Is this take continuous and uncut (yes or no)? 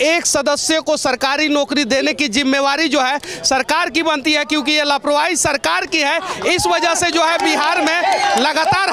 yes